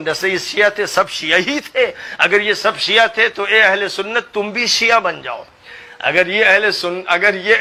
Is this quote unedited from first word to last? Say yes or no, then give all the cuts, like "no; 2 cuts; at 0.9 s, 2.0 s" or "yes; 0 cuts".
yes; 0 cuts